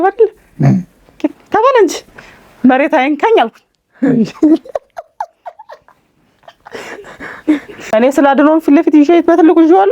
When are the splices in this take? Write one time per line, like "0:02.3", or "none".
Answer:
0:07.7